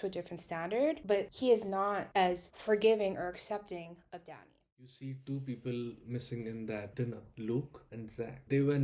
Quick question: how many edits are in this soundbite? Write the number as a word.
one